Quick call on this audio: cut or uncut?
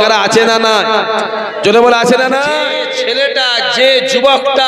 cut